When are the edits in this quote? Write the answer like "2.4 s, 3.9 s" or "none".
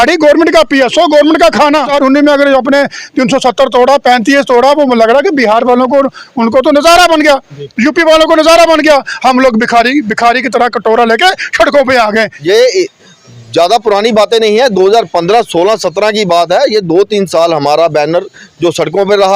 1.9 s, 12.3 s